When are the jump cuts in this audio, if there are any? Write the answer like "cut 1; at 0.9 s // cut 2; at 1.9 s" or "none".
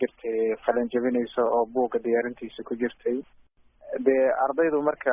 cut 1; at 3.5 s

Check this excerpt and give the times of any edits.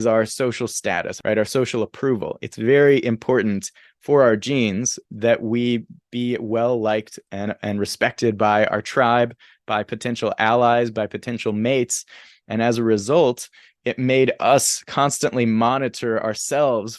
cut 1; at 1.1 s // cut 2; at 5.0 s

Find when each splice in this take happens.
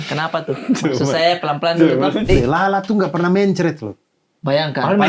cut 1; at 2.3 s

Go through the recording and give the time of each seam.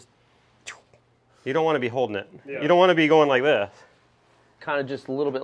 cut 1; at 1.2 s // cut 2; at 4.5 s

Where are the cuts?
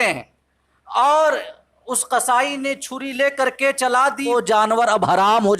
cut 1; at 4.3 s

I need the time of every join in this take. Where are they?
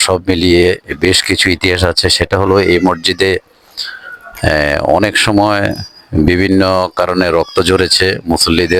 none

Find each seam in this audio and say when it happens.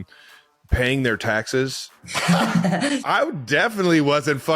cut 1; at 3.0 s

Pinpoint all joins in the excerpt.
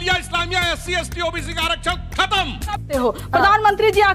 cut 1; at 2.8 s

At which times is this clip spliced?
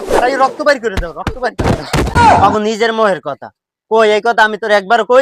cut 1; at 2.1 s

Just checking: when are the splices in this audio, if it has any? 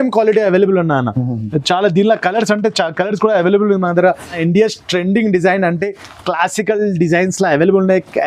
cut 1; at 4.3 s

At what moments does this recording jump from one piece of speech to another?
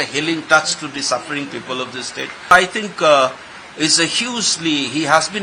cut 1; at 2.5 s

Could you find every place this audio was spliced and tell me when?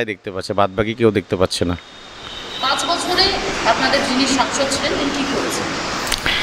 none

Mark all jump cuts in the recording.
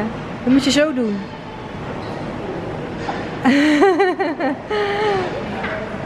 none

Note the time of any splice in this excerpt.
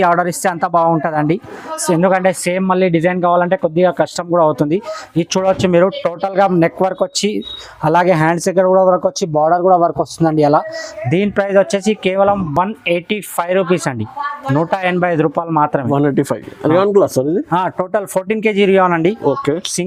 none

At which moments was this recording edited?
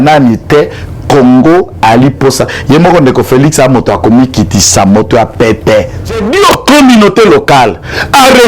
cut 1; at 6.3 s

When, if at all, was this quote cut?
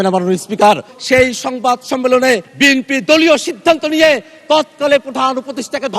cut 1; at 0.9 s // cut 2; at 2.5 s

